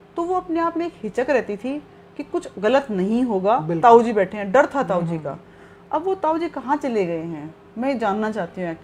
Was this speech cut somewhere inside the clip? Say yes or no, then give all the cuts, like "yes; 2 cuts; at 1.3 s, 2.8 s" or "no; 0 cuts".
no; 0 cuts